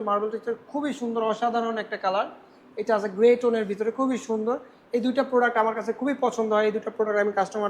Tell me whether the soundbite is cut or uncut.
uncut